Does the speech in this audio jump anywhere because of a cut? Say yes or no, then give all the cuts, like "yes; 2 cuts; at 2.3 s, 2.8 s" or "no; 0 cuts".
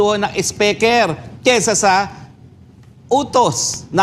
no; 0 cuts